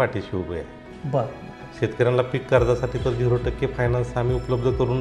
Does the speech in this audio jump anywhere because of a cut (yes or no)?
yes